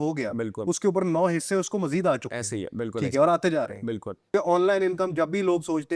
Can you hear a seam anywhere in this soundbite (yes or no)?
yes